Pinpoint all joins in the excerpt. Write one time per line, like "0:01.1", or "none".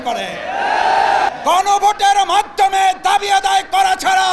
0:01.3